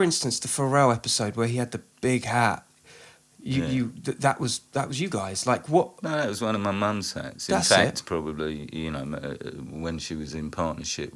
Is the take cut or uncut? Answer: uncut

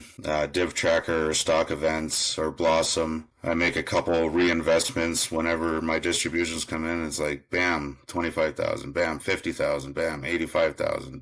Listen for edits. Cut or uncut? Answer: uncut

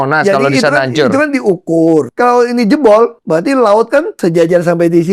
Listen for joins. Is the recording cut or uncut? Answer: cut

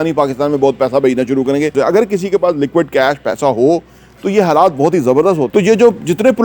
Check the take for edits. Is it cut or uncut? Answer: cut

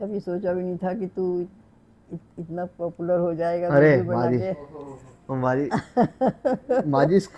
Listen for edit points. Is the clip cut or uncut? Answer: uncut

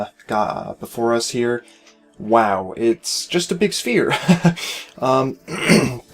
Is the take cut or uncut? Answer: cut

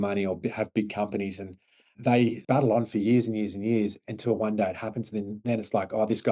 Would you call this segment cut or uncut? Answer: uncut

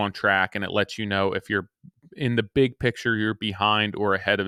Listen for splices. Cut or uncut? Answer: uncut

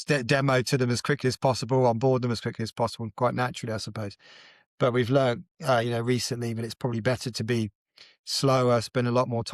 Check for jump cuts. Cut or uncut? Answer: uncut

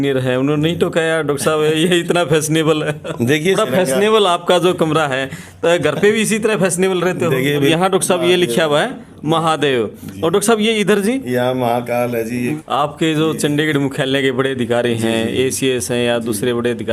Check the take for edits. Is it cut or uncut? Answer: cut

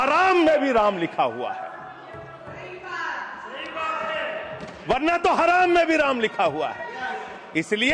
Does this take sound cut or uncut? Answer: uncut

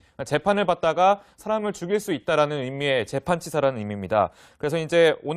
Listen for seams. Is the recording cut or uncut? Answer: cut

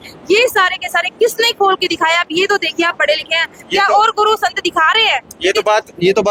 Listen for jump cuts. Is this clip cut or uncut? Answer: uncut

